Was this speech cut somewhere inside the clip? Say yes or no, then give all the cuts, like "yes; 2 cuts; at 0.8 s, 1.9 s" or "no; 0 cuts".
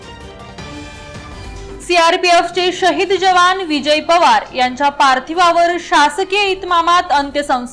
yes; 1 cut; at 1.5 s